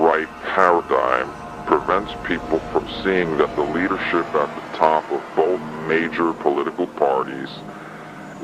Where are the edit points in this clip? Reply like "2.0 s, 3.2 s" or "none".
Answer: 2.5 s